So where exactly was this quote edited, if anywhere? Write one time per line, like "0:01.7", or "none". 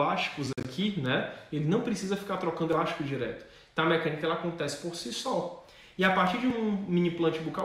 none